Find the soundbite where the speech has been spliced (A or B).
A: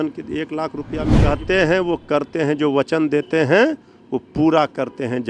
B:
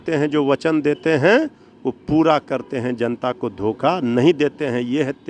A